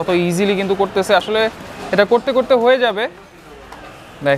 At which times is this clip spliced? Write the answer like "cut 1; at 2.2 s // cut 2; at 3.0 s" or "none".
none